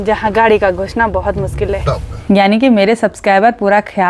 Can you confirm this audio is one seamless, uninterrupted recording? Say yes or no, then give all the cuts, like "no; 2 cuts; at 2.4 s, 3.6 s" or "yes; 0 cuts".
no; 1 cut; at 2.1 s